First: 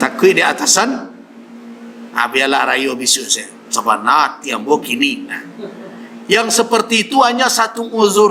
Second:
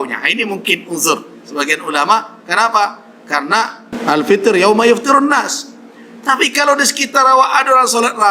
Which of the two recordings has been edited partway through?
second; 1 cut; at 3.9 s

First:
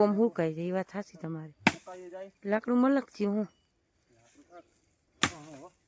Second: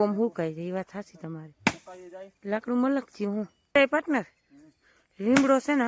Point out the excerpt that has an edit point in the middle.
second; 1 cut; at 3.8 s

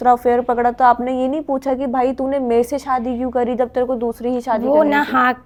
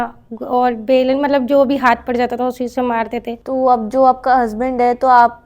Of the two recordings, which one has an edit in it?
second; 1 cut; at 3.4 s

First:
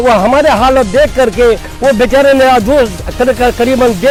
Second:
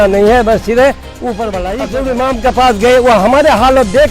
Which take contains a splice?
second; 1 cut; at 1.6 s

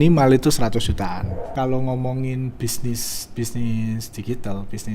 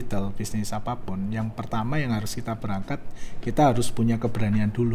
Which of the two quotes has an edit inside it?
first; 1 cut; at 1.5 s

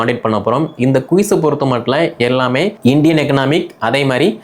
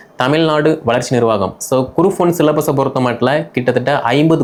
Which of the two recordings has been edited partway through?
first; 1 cut; at 2.8 s

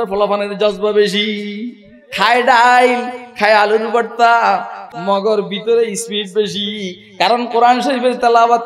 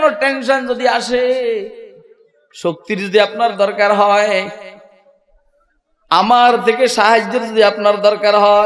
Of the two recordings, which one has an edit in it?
first; 1 cut; at 4.8 s

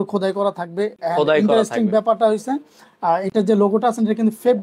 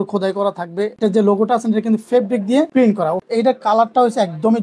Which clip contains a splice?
second; 2 cuts; at 0.9 s, 3.1 s

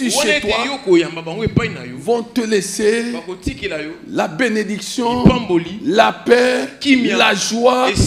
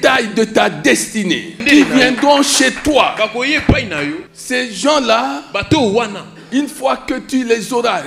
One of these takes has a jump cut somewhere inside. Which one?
second; 2 cuts; at 1.6 s, 4.3 s

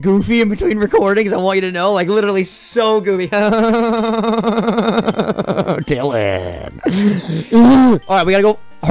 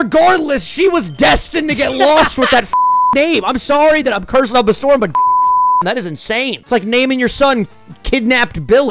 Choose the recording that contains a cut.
second; 1 cut; at 6.6 s

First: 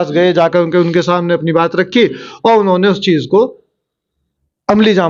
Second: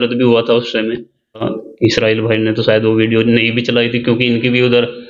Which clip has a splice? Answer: second; 1 cut; at 1.5 s

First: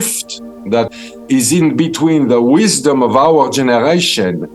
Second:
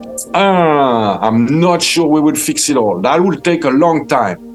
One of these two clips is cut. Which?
first; 1 cut; at 0.9 s

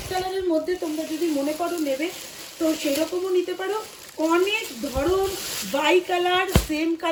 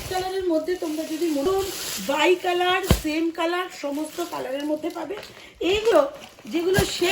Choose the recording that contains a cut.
second; 2 cuts; at 1.4 s, 5.9 s

